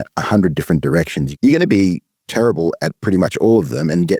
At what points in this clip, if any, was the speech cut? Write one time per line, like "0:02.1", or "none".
0:01.2